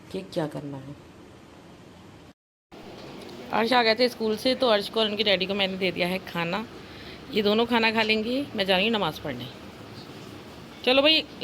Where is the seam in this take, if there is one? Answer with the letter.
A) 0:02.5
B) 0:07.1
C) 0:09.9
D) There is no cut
A